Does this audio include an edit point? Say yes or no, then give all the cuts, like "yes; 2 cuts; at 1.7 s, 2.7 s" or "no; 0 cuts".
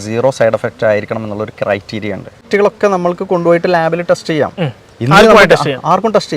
yes; 1 cut; at 2.5 s